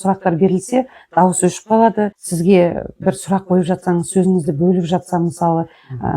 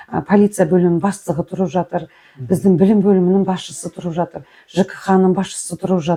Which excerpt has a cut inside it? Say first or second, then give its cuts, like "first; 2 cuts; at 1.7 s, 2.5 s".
first; 1 cut; at 2.2 s